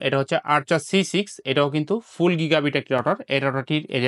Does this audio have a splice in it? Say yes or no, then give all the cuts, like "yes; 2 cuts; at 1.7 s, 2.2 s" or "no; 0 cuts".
no; 0 cuts